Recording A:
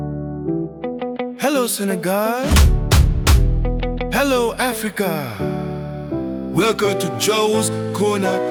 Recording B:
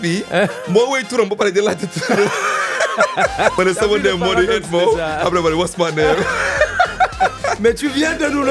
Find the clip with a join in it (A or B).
B